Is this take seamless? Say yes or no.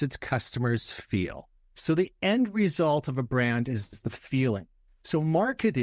yes